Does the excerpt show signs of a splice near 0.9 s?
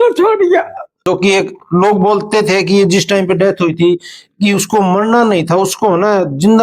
yes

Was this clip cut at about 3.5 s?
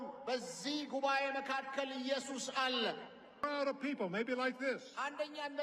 yes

